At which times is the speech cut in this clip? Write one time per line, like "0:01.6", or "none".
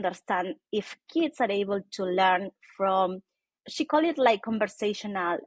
0:03.6